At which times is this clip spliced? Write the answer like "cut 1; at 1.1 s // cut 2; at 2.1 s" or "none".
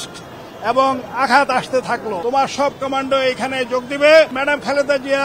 cut 1; at 2.1 s // cut 2; at 4.4 s